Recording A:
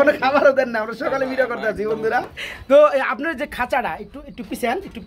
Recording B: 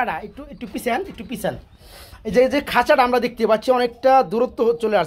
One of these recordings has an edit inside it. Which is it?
A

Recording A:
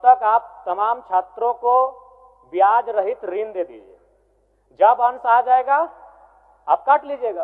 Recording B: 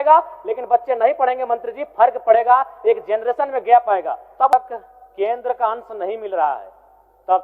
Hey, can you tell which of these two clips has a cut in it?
B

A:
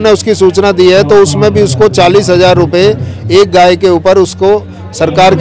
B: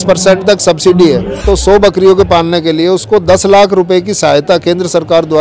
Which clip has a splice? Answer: B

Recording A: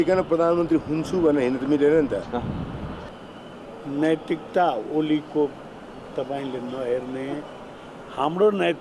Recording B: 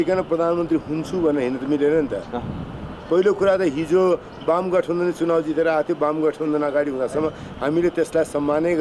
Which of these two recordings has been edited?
A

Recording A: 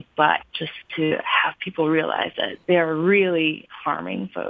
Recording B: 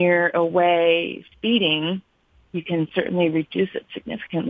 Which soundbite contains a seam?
A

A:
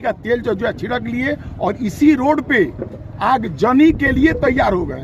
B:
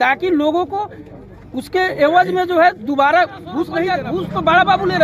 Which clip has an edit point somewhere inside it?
B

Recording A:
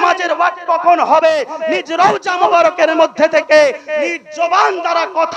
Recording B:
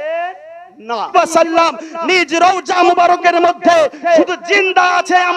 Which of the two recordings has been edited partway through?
B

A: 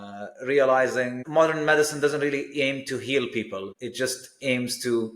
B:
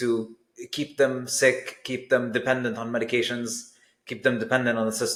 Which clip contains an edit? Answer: A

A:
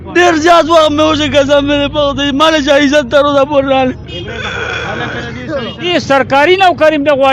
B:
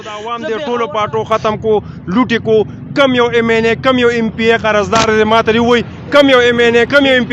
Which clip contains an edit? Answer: A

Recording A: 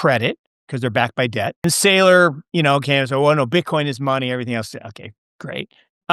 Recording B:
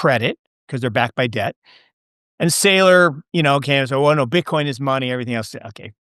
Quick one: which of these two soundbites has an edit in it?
A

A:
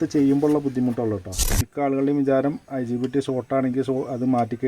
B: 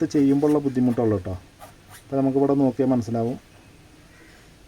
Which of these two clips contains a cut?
A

